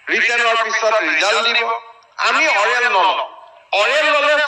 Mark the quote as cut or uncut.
uncut